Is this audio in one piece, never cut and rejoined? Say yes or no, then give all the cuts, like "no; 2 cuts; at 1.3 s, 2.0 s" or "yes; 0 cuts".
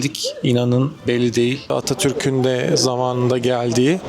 no; 1 cut; at 1.6 s